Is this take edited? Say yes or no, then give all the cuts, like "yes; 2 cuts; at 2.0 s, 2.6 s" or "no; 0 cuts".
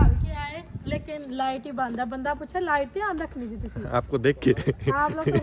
no; 0 cuts